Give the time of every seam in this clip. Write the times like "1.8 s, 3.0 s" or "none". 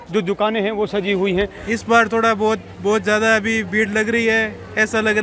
1.6 s